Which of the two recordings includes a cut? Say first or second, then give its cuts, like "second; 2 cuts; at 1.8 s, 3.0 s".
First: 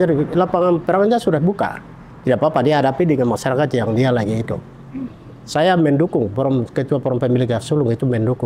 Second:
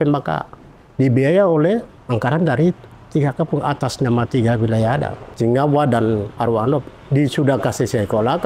second; 2 cuts; at 1.9 s, 5.2 s